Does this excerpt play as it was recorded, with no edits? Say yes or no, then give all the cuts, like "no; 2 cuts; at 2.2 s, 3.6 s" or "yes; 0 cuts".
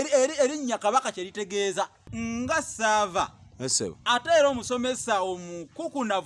no; 1 cut; at 2.0 s